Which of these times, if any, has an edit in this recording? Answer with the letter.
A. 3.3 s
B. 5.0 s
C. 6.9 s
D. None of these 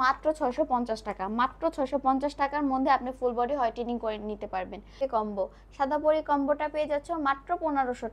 B